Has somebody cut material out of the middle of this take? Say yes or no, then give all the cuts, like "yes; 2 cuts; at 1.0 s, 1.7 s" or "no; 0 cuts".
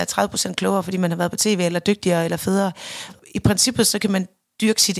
yes; 1 cut; at 3.1 s